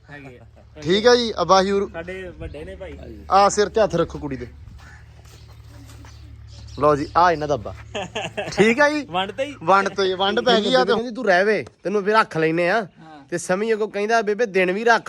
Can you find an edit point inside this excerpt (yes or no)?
yes